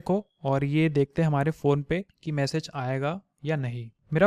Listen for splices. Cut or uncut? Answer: uncut